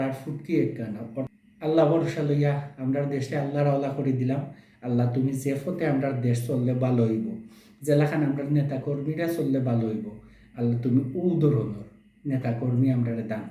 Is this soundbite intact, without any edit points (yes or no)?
no